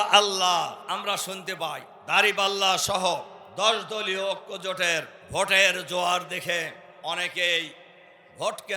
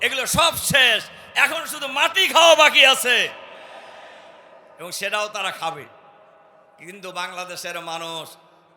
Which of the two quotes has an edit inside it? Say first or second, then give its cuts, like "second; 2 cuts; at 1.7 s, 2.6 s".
first; 5 cuts; at 0.8 s, 1.9 s, 3.4 s, 5.2 s, 6.9 s